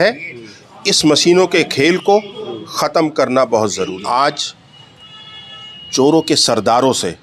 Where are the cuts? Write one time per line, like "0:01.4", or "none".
0:04.0